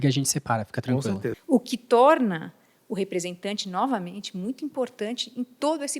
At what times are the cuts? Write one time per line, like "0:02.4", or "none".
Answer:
0:01.3